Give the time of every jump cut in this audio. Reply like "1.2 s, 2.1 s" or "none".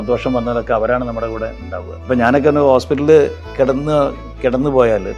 1.9 s